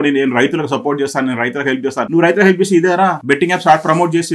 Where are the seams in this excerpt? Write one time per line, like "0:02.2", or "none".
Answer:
0:02.1
0:03.2

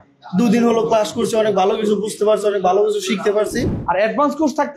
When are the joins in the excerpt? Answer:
0:03.7

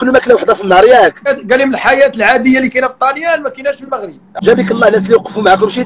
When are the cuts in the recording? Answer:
0:01.3
0:04.3

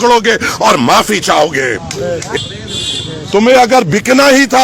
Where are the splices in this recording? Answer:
0:02.4

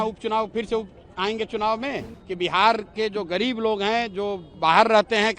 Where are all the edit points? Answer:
0:02.2

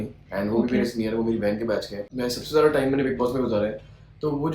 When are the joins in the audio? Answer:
0:02.0

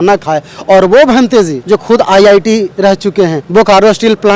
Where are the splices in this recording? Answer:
0:01.6
0:03.4

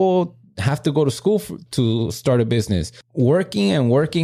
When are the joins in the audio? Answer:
0:03.0

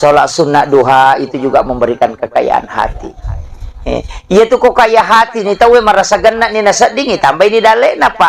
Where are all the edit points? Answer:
none

